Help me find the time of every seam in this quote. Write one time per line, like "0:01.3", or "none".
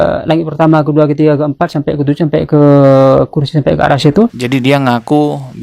0:04.4